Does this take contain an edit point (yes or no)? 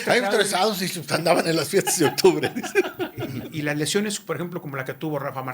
yes